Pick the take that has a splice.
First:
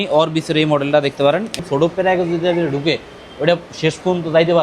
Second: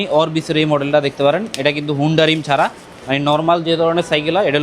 first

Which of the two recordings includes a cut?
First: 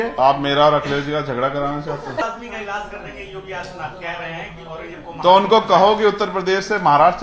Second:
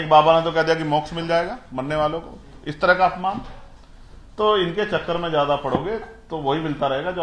first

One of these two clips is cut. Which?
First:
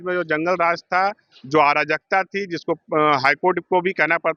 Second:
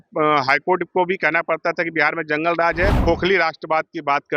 second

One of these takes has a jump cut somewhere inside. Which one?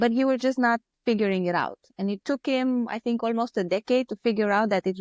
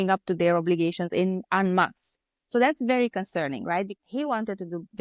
second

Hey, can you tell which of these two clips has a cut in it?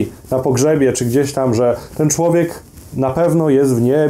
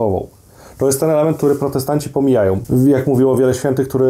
second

